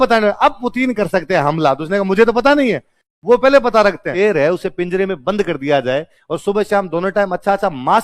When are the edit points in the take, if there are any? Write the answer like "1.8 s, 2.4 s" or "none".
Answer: 4.1 s